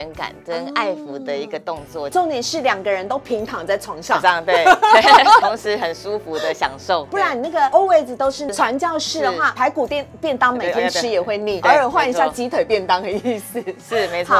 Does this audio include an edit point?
yes; 6 cuts; at 2.1 s, 5.4 s, 7.2 s, 8.5 s, 9.5 s, 11.6 s

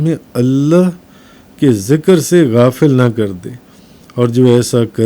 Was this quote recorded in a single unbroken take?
yes; 0 cuts

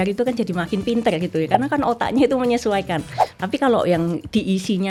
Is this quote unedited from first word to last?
yes; 0 cuts

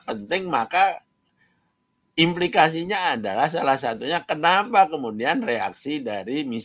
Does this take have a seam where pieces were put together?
no; 0 cuts

